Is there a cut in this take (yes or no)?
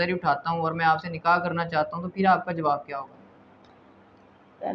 no